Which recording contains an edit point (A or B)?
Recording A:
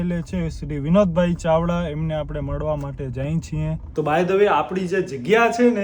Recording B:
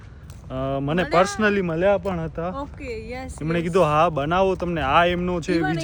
A